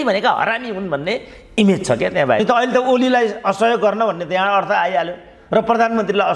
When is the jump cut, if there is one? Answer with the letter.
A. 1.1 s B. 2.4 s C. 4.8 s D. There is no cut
B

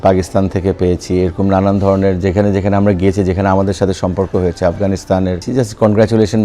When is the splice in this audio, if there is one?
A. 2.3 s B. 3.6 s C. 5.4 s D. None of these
C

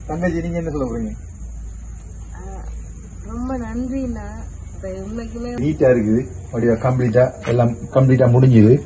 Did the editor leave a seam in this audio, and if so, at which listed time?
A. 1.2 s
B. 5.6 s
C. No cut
B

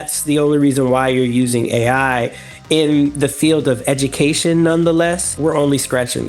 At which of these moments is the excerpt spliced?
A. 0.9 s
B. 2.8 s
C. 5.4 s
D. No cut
C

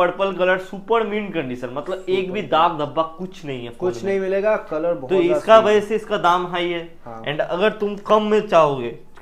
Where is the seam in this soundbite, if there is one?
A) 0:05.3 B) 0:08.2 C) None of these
C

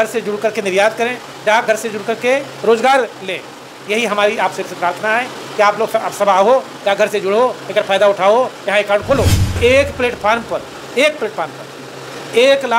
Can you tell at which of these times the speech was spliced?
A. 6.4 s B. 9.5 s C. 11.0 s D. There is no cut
B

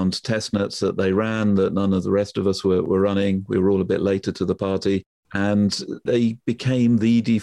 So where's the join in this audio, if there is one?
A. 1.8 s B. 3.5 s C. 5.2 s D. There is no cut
C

